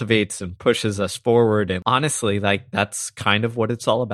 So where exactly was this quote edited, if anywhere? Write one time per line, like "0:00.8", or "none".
0:01.8